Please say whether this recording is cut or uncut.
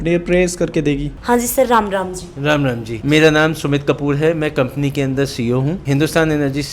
uncut